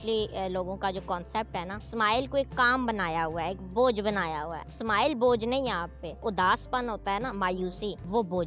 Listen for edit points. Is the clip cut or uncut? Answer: cut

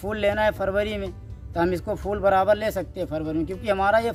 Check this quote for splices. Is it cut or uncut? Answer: uncut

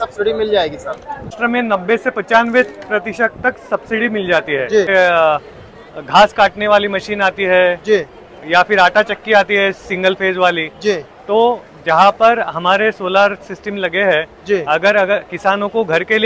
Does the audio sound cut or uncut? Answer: cut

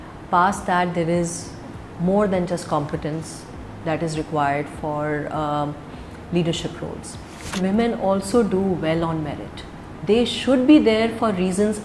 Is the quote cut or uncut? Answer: cut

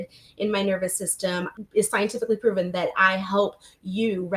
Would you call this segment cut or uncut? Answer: cut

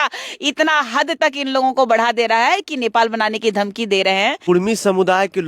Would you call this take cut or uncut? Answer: cut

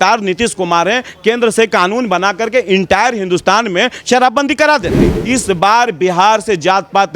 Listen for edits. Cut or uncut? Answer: cut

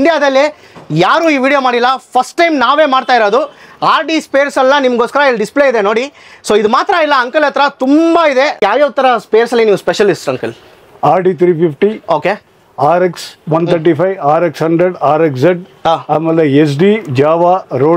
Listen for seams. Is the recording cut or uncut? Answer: cut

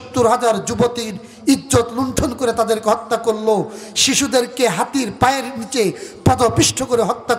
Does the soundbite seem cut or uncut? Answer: uncut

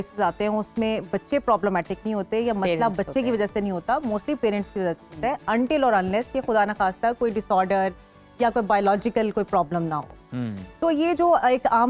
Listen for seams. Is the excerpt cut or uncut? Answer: uncut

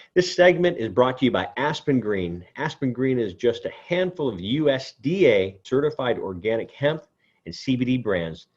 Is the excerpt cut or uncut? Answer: cut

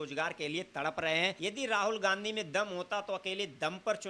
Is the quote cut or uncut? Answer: cut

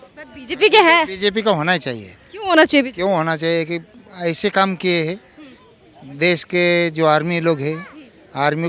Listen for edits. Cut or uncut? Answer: uncut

